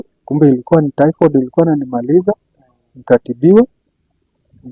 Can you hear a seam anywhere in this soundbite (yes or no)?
no